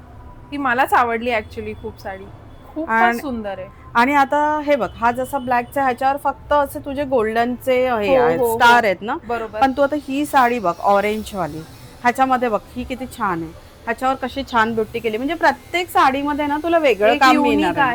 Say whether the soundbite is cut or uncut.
uncut